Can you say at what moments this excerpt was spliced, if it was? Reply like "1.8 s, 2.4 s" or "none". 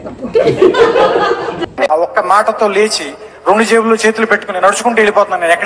1.7 s